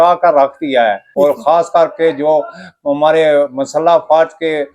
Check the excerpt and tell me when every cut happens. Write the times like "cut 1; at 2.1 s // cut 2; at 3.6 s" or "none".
cut 1; at 1.0 s